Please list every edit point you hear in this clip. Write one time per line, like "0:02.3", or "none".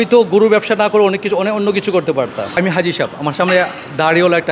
0:02.6